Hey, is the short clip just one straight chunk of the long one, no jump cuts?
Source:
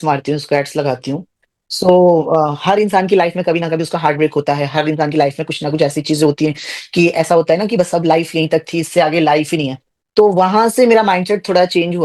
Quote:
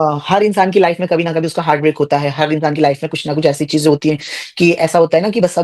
yes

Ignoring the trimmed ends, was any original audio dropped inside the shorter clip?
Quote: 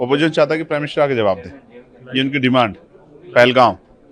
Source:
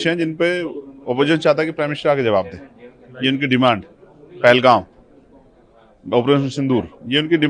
no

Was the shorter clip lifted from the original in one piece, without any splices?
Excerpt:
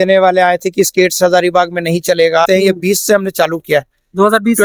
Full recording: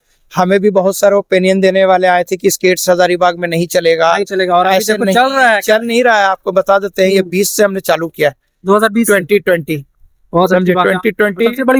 no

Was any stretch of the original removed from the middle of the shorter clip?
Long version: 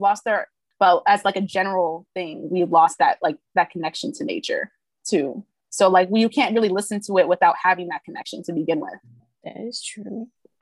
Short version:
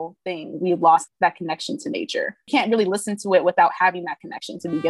yes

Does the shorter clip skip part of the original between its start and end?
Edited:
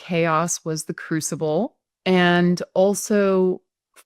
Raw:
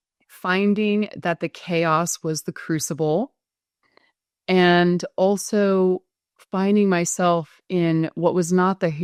yes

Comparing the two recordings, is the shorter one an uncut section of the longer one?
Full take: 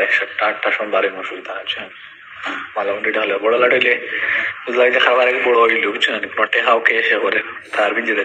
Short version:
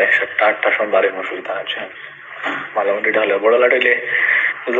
yes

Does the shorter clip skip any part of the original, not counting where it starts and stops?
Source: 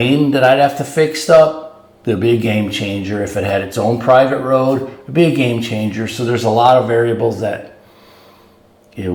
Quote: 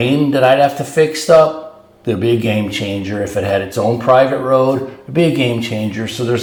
no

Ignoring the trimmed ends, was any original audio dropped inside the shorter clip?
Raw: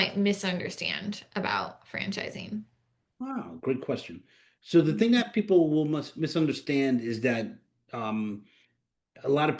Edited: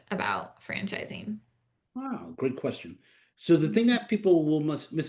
no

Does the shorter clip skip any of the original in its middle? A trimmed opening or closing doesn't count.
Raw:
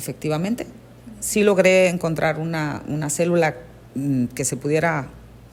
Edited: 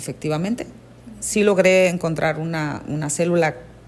no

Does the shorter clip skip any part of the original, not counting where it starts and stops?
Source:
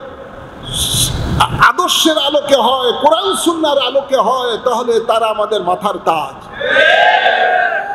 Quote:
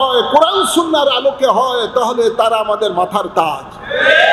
no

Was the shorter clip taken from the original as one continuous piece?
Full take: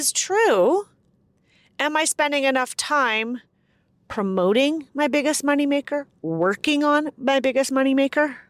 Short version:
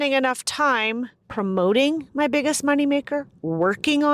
no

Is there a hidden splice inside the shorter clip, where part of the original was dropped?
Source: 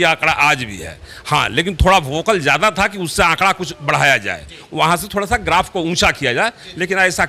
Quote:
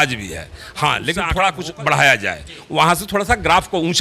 yes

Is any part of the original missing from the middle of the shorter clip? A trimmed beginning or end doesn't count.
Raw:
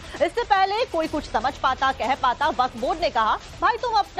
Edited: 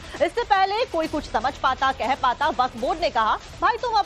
no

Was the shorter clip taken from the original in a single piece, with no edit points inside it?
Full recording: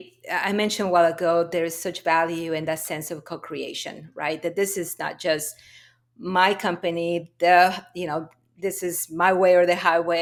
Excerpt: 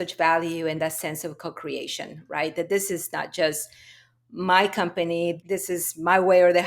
no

